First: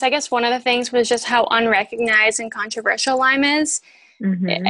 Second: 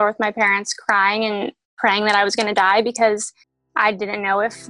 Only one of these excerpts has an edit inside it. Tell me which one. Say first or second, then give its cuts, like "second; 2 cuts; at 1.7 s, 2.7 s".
second; 1 cut; at 1.6 s